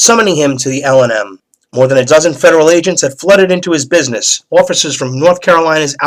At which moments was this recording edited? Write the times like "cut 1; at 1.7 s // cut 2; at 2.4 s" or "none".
cut 1; at 4.6 s